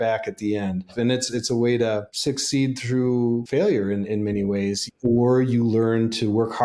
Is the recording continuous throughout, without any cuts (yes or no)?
no